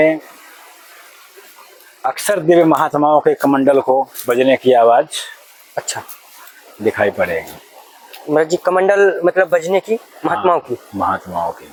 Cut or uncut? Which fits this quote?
uncut